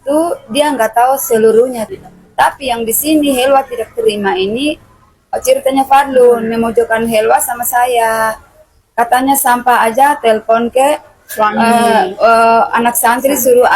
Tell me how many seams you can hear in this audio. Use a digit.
1